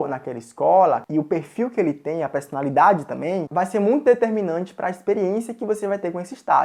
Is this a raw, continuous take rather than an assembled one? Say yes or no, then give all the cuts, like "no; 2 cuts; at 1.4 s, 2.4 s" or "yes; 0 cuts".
yes; 0 cuts